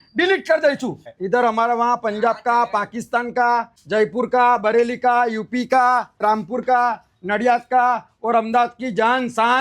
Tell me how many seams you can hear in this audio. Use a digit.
3